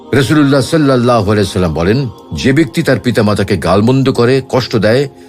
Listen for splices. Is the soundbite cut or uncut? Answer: uncut